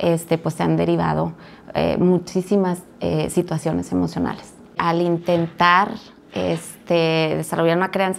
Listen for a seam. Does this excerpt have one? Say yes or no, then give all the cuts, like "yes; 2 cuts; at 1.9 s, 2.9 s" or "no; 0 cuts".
yes; 1 cut; at 4.8 s